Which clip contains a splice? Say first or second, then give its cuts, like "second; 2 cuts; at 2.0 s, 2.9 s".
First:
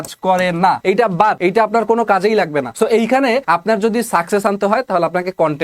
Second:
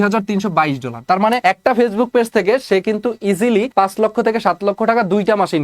second; 2 cuts; at 1.4 s, 3.7 s